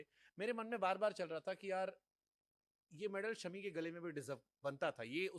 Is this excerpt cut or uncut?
uncut